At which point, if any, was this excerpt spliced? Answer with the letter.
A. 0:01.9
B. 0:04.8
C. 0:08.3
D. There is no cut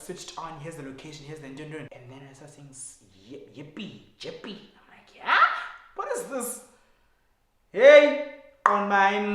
A